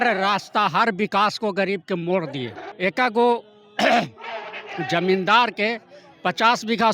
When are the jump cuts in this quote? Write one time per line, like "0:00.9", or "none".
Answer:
0:02.6